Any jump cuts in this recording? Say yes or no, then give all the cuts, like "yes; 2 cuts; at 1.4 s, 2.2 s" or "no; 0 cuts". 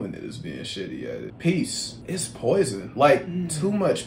yes; 2 cuts; at 1.3 s, 1.9 s